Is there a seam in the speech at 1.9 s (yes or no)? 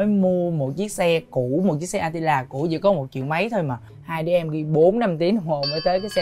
no